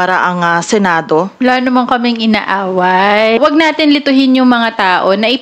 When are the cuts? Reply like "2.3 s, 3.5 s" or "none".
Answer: 3.4 s